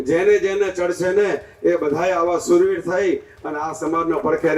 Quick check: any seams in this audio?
no; 0 cuts

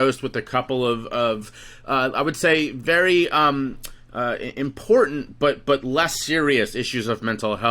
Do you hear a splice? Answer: no; 0 cuts

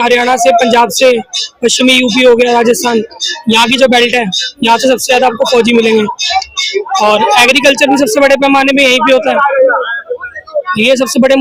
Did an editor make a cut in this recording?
no; 0 cuts

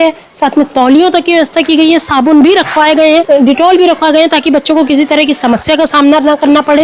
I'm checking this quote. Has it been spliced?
yes; 1 cut; at 3.2 s

